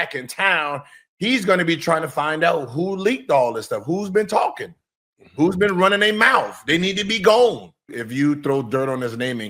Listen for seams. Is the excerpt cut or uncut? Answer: cut